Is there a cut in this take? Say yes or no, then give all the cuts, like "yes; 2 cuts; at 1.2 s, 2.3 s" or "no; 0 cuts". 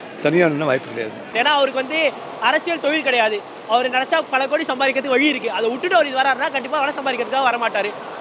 yes; 1 cut; at 1.2 s